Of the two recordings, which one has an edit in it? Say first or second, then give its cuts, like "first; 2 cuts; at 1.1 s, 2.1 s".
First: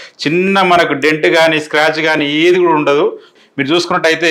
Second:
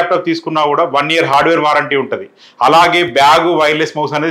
first; 1 cut; at 3.3 s